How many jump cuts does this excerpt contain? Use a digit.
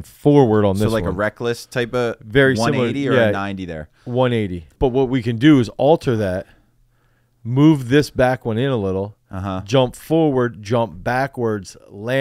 1